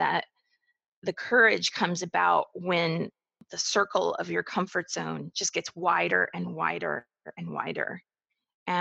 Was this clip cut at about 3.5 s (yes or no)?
yes